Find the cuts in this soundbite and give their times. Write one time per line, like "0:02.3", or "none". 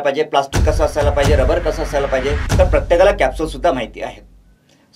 0:02.4